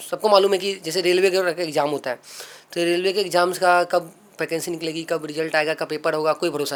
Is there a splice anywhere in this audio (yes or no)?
no